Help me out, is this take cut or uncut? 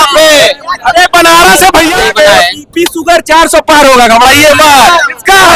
cut